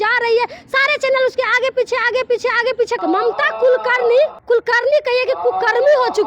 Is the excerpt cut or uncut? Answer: cut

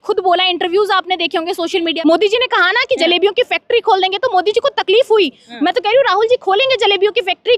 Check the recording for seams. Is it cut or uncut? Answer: cut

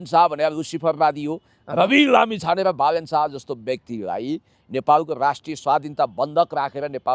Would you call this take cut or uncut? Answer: uncut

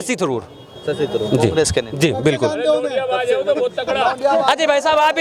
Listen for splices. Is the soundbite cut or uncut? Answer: uncut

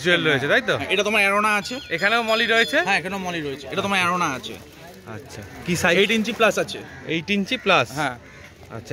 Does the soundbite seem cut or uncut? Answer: uncut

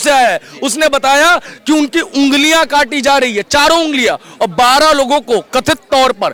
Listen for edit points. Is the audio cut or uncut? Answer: uncut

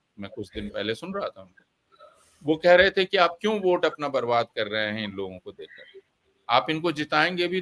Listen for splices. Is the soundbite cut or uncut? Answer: uncut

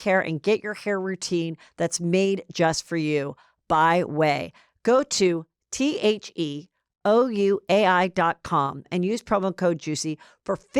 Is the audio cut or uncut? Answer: cut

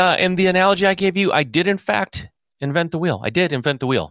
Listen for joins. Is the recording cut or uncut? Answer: uncut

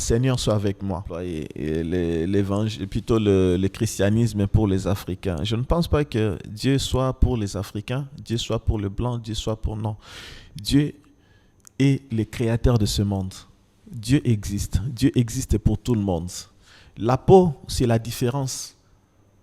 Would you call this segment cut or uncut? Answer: cut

